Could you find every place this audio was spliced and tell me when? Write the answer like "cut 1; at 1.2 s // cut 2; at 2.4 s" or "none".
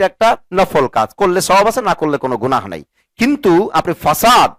none